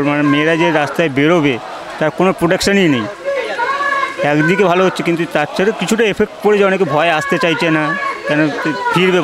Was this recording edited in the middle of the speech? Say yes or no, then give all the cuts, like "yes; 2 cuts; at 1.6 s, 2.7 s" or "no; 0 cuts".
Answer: no; 0 cuts